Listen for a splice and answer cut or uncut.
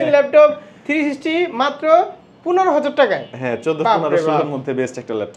uncut